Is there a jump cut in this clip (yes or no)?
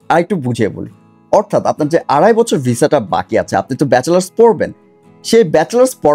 no